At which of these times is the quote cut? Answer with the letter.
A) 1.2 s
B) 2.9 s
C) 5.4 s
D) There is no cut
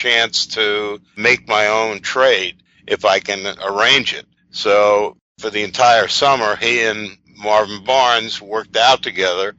A